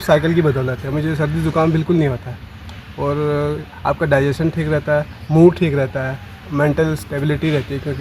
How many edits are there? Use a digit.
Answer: 0